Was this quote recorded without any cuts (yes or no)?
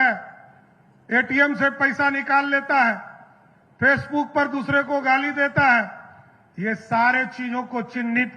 yes